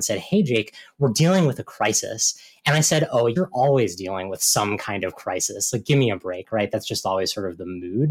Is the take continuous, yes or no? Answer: no